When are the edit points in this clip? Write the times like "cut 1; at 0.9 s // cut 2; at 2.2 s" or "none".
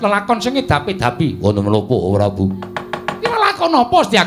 cut 1; at 3.3 s